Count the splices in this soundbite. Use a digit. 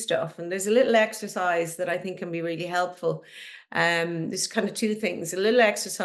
0